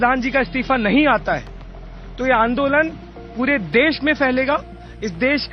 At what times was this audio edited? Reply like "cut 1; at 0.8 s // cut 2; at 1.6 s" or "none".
none